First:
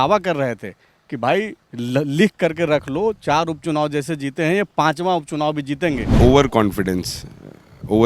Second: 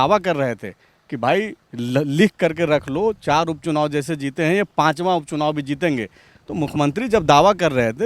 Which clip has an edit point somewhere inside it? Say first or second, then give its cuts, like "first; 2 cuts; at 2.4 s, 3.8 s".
first; 1 cut; at 6.1 s